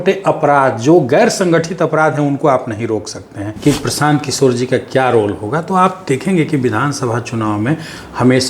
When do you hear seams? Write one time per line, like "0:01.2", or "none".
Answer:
0:03.4